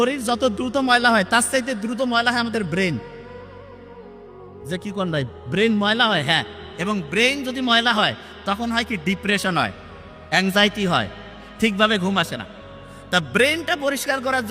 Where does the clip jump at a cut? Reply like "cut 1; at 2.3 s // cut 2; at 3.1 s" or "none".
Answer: none